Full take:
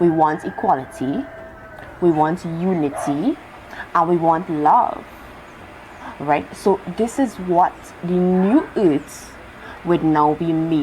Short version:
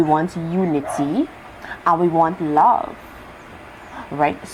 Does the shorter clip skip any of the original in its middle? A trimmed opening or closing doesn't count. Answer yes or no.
no